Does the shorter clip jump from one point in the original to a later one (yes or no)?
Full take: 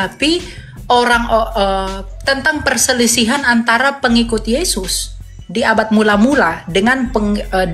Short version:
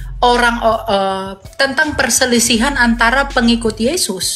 no